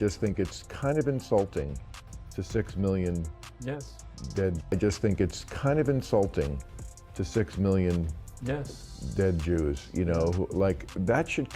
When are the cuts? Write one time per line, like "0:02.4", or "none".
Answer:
0:04.7